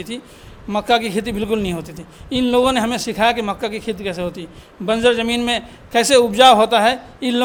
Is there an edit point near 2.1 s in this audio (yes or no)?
no